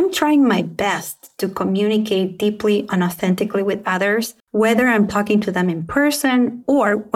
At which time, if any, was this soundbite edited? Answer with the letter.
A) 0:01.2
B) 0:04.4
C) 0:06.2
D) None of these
B